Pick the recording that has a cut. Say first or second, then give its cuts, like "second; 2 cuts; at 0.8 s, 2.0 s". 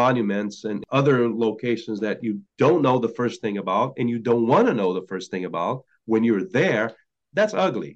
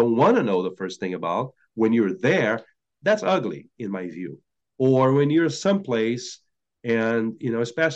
first; 2 cuts; at 0.8 s, 2.5 s